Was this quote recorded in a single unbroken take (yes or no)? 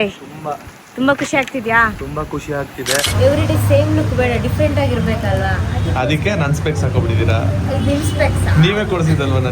no